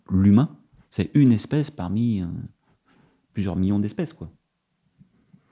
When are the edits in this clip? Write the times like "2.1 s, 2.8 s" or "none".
none